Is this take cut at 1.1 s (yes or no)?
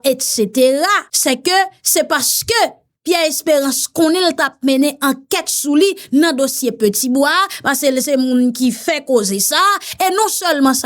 yes